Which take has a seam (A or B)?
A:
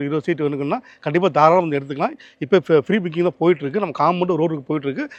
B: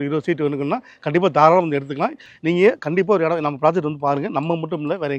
B